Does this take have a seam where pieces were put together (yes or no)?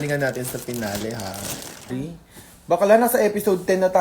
yes